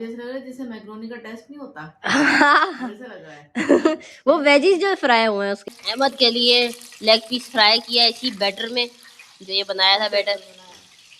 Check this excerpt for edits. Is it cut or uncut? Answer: cut